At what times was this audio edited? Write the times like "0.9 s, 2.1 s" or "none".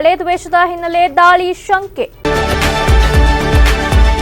2.1 s

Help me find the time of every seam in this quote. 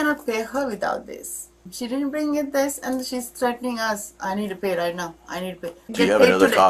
1.6 s, 5.9 s

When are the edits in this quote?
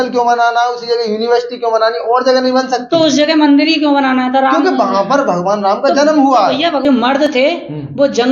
6.8 s

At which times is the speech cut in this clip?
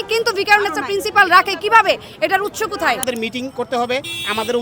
3.0 s

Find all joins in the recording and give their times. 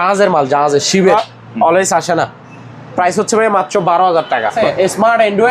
1.1 s, 4.6 s

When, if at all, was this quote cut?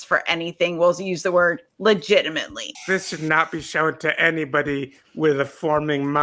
2.6 s

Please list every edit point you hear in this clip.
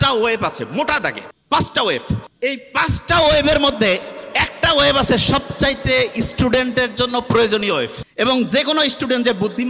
1.3 s, 2.3 s, 8.0 s

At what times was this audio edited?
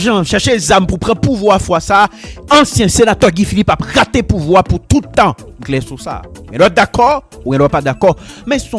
none

